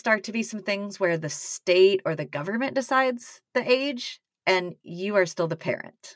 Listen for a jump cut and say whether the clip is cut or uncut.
uncut